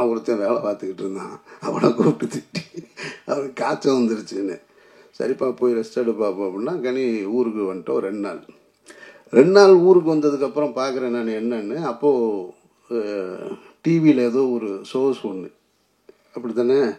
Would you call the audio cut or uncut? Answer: uncut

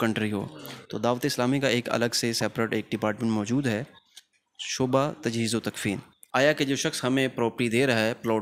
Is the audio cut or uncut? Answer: cut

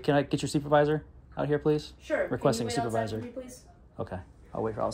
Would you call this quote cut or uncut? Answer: uncut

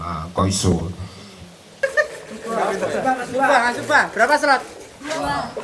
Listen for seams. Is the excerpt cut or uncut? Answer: cut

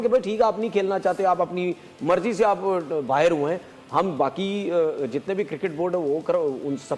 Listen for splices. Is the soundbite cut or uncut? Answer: uncut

